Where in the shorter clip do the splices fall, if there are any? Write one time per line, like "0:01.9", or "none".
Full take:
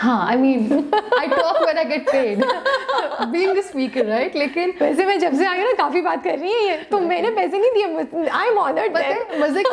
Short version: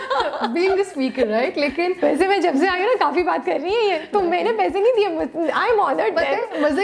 none